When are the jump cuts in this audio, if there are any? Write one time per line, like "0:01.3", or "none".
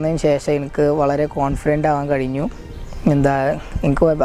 none